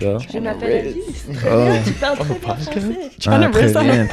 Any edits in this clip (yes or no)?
no